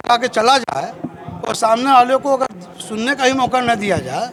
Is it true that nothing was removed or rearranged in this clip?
yes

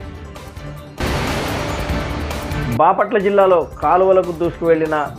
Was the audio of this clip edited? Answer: yes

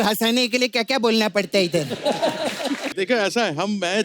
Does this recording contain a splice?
yes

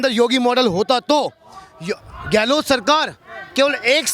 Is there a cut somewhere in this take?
no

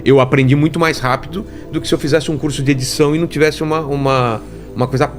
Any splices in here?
no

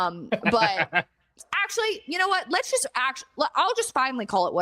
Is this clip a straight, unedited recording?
no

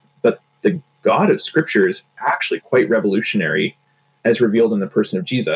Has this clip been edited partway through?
no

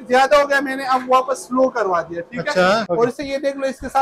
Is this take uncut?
no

